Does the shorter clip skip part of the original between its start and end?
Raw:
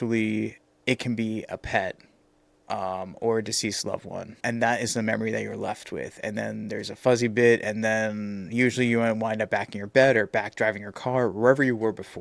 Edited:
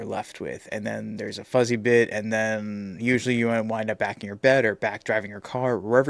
no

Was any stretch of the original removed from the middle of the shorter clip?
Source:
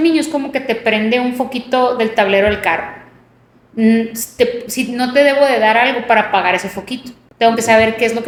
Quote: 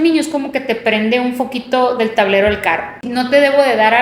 yes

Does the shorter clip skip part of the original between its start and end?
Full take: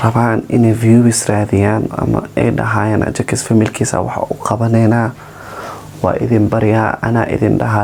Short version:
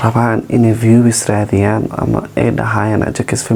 no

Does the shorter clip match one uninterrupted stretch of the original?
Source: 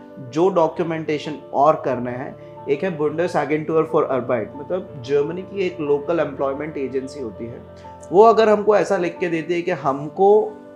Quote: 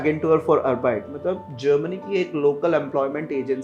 yes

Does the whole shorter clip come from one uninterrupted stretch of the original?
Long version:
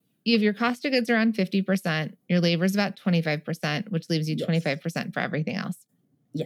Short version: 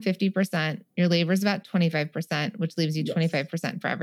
yes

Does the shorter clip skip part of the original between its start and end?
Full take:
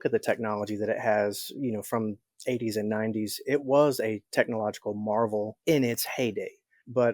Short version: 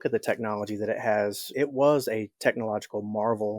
yes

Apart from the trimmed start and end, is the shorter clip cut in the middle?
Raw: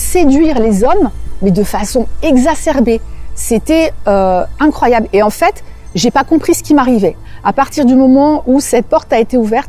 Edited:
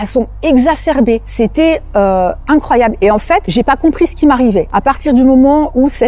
yes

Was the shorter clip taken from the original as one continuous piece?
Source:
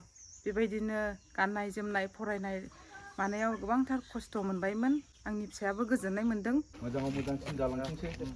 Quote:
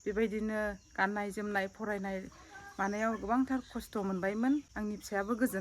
no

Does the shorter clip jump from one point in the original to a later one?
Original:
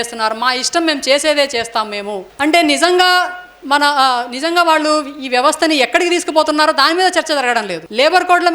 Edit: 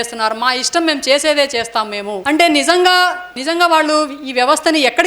yes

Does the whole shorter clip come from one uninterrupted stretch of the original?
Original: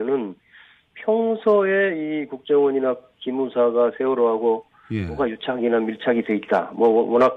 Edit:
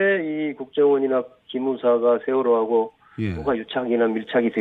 yes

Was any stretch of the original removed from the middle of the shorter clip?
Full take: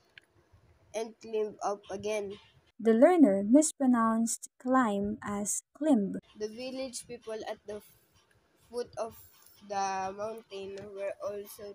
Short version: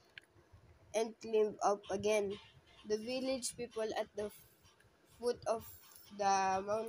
yes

